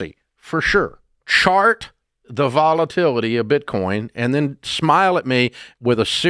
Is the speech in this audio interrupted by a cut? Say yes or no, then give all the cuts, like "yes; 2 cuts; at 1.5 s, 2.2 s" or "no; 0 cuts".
yes; 1 cut; at 1.2 s